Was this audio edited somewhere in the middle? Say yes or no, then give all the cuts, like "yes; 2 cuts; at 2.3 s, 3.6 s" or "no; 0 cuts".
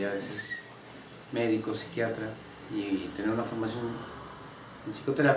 no; 0 cuts